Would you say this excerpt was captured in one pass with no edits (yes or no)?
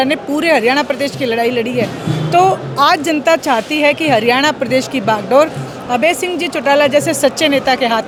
yes